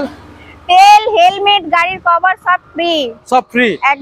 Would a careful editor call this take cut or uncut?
uncut